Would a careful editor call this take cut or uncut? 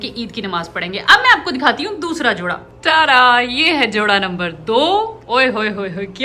uncut